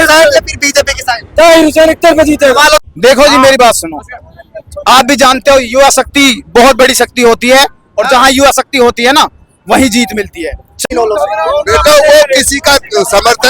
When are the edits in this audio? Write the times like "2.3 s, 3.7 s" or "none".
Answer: 2.8 s, 10.8 s

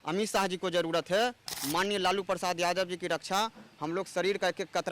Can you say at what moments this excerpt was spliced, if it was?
1.5 s

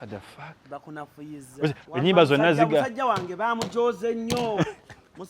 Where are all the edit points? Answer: 1.8 s

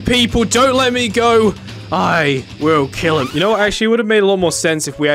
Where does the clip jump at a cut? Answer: none

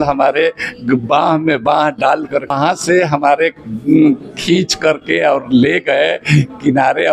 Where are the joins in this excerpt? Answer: 2.5 s

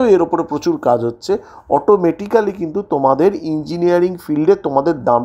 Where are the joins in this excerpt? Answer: none

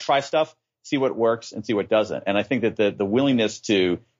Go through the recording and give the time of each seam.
none

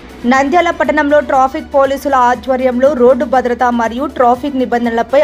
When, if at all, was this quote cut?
none

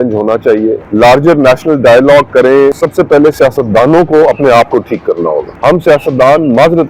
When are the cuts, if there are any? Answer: 0.8 s, 2.8 s, 5.5 s

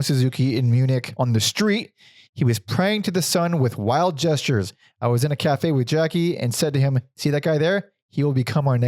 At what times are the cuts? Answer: 1.1 s

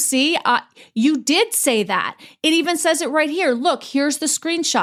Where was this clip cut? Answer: none

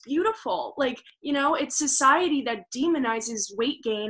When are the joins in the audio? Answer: 1.1 s

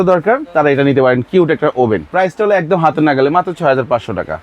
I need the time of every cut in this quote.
2.1 s

